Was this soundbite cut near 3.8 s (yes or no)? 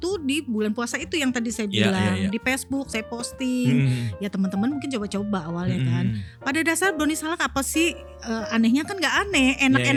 no